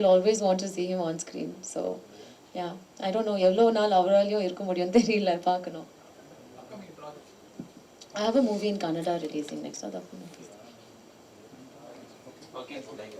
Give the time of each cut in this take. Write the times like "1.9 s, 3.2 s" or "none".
none